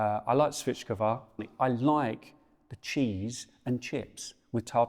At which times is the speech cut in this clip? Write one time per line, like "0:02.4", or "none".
0:01.5